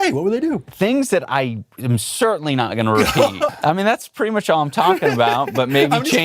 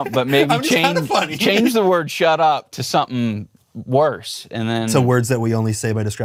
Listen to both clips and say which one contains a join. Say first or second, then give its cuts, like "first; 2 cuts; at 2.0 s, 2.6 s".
first; 1 cut; at 3.6 s